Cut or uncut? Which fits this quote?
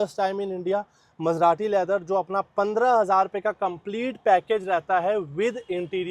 uncut